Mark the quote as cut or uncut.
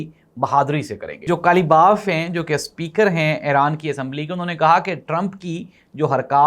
cut